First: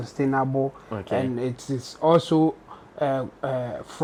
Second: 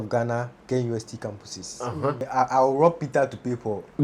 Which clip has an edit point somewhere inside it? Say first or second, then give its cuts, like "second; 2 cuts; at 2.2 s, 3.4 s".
second; 1 cut; at 2.3 s